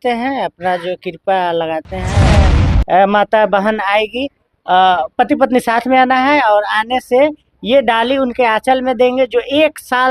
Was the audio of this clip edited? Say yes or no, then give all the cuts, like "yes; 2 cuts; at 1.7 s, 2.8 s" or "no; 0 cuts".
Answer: yes; 1 cut; at 2.4 s